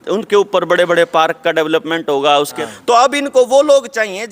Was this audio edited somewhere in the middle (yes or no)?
yes